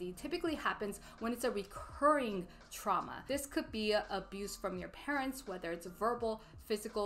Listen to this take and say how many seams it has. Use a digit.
0